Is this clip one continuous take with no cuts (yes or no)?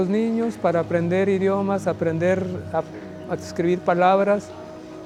yes